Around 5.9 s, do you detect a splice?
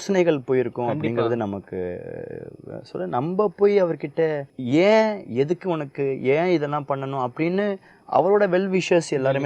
no; 1 cut; at 4.5 s

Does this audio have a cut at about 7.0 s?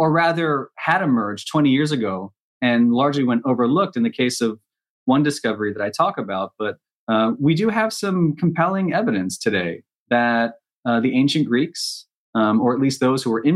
no; 0 cuts

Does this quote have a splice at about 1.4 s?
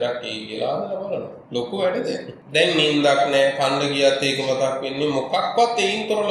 yes; 2 cuts; at 1.4 s, 2.4 s

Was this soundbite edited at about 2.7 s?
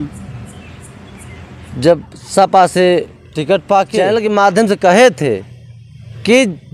no; 1 cut; at 4.1 s

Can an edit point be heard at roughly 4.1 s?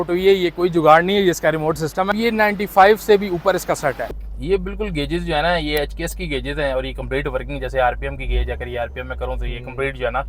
yes; 2 cuts; at 2.1 s, 4.1 s

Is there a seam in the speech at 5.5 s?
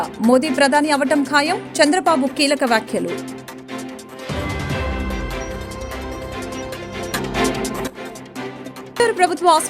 no; 1 cut; at 7.1 s

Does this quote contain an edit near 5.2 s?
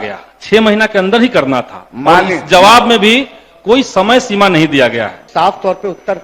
yes; 1 cut; at 5.2 s

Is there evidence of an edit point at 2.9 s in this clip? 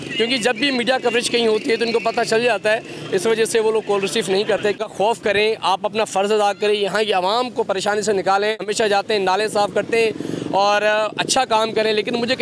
no; 2 cuts; at 4.7 s, 8.7 s

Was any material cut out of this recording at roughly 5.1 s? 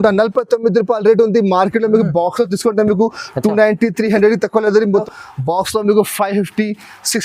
yes; 1 cut; at 5.1 s

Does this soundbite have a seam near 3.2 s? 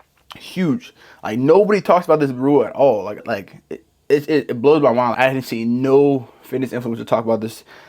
yes; 2 cuts; at 3.2 s, 5.1 s

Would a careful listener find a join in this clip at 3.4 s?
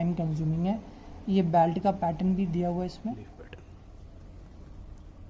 yes; 1 cut; at 3.4 s

